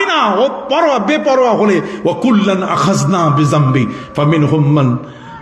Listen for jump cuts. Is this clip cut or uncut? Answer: uncut